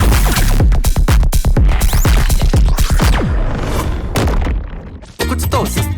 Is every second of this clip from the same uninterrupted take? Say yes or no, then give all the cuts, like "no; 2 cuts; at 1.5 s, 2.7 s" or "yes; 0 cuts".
no; 1 cut; at 5.0 s